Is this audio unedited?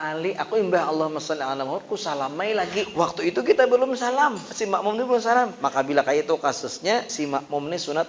no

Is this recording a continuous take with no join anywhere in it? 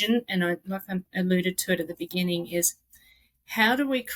yes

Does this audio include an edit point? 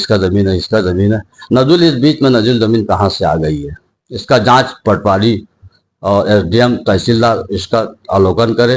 no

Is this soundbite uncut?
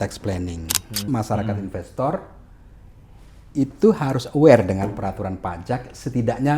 no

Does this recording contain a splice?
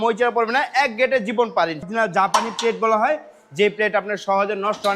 yes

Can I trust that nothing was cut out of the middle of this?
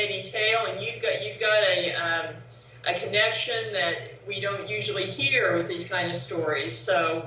no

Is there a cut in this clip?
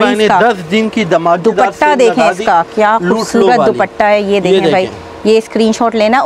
no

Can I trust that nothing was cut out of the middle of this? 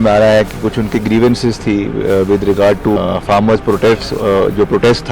no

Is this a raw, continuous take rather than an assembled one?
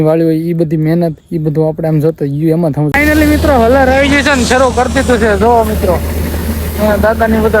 no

